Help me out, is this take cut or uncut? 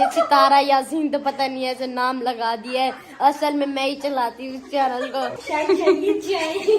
cut